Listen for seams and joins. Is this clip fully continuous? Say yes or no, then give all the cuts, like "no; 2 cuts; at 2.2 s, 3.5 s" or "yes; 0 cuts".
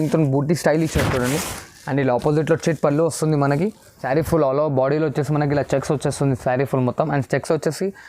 no; 1 cut; at 4.0 s